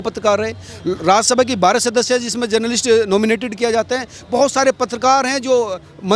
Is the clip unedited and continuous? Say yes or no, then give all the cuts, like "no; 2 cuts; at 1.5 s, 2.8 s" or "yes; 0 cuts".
yes; 0 cuts